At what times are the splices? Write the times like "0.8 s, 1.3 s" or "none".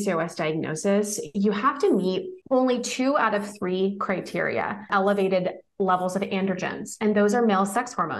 4.9 s